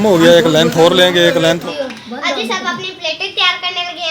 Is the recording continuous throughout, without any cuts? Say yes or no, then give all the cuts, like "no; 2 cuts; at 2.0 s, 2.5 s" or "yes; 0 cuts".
no; 1 cut; at 1.6 s